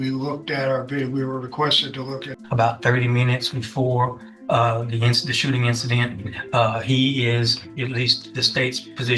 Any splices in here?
yes; 1 cut; at 2.3 s

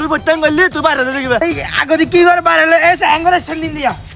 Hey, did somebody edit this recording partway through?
yes; 1 cut; at 1.4 s

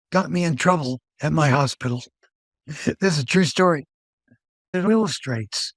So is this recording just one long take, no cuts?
no; 1 cut; at 4.9 s

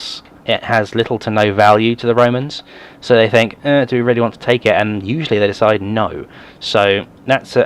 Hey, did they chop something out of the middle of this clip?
yes; 1 cut; at 1.5 s

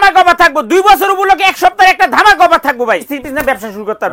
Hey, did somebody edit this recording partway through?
yes; 1 cut; at 3.0 s

